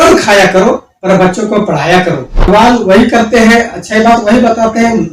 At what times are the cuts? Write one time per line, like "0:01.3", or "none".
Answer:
0:02.5

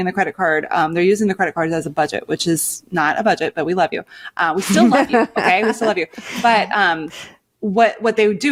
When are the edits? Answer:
none

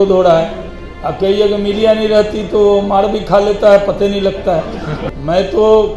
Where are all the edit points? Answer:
0:04.9

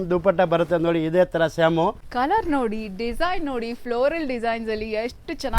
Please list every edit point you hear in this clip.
0:02.0

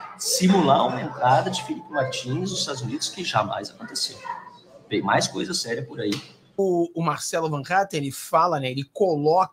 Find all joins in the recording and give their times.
0:06.6

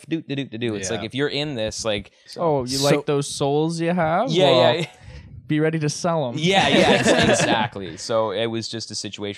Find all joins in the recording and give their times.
0:02.2

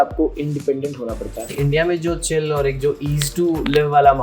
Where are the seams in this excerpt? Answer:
0:01.5

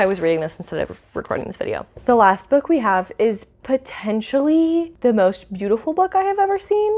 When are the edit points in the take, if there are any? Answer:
0:01.9
0:04.9

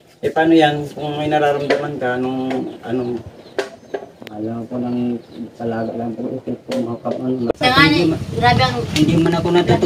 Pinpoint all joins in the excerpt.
0:07.5

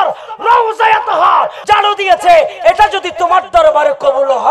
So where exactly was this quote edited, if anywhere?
none

